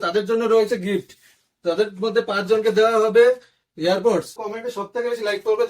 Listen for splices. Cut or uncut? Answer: cut